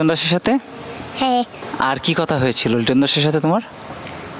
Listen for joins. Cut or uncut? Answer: cut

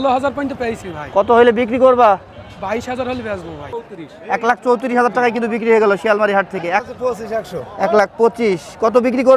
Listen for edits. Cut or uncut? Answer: cut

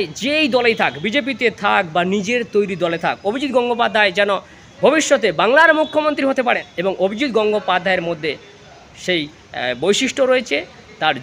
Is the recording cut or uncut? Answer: cut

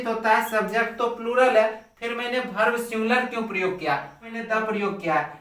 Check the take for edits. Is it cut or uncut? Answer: cut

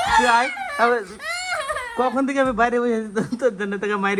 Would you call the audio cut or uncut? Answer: uncut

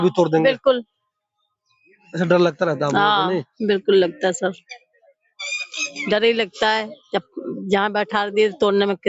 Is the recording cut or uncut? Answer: uncut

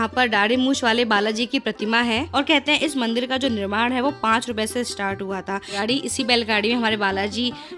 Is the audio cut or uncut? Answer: cut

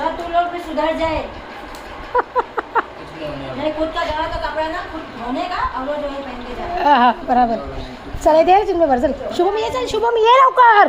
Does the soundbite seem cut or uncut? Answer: uncut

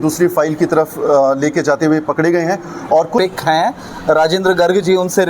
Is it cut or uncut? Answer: cut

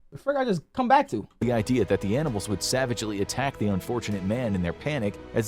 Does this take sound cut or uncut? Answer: cut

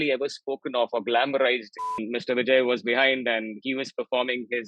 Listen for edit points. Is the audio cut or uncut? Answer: cut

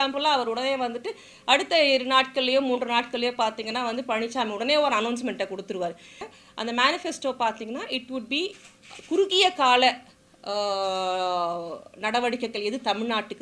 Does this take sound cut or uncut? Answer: cut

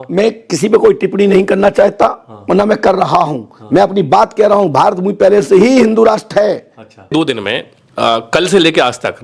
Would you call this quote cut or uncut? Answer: cut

